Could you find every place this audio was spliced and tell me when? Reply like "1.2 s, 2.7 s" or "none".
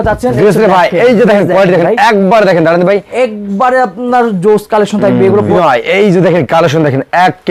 5.5 s